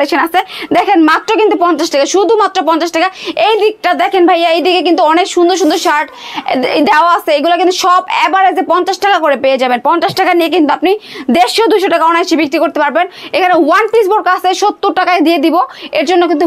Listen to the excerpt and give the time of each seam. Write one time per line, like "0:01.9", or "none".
none